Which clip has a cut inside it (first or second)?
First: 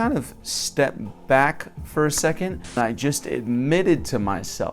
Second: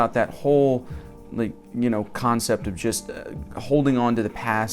first